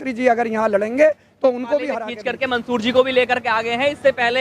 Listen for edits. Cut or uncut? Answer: cut